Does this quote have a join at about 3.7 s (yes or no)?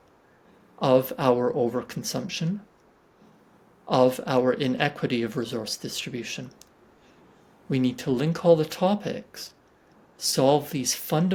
no